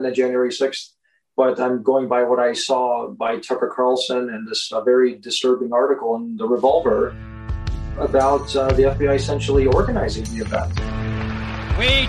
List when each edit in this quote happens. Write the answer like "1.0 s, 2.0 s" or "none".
10.7 s